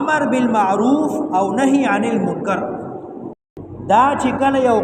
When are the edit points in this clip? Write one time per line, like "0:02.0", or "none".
0:03.4